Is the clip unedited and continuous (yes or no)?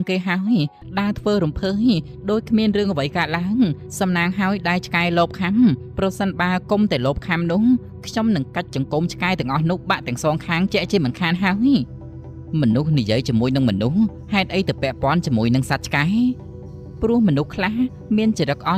yes